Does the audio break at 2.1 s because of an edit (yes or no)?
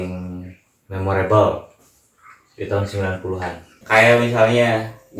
no